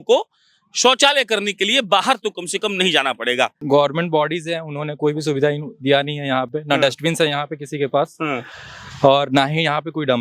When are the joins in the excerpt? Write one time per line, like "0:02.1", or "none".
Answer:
0:03.6